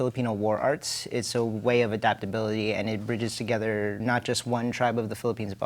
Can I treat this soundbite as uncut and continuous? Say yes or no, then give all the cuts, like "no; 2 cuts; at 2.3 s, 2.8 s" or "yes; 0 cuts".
no; 1 cut; at 4.0 s